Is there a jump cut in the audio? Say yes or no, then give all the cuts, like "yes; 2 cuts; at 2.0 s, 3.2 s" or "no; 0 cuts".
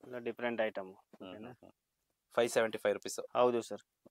no; 0 cuts